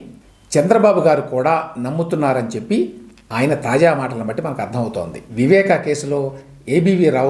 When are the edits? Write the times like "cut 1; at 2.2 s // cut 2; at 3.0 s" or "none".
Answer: cut 1; at 5.2 s